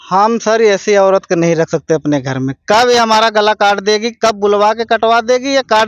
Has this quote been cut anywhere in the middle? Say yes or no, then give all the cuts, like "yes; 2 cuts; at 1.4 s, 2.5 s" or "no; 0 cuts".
no; 0 cuts